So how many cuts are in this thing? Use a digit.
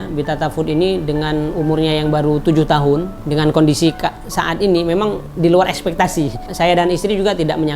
1